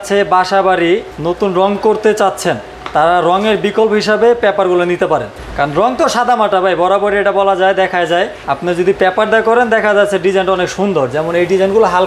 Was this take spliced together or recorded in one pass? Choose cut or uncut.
uncut